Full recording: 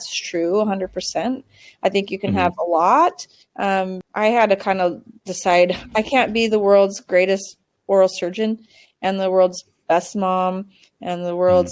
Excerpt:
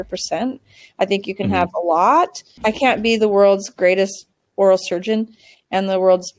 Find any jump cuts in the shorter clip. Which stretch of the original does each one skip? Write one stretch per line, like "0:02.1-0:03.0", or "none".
0:03.3-0:05.8